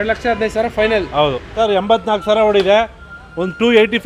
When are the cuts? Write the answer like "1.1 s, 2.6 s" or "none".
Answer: 1.4 s